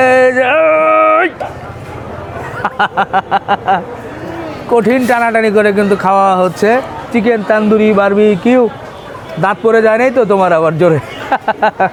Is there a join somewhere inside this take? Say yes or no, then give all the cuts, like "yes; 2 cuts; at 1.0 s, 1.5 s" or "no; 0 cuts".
no; 0 cuts